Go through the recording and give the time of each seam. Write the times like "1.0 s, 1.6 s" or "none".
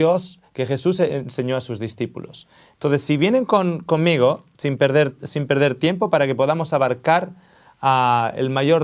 6.6 s